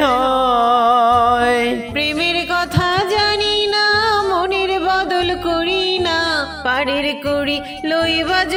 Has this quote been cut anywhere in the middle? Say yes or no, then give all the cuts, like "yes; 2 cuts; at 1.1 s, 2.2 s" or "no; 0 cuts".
no; 0 cuts